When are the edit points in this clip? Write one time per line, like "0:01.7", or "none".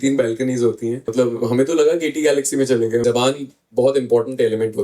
0:01.1
0:03.0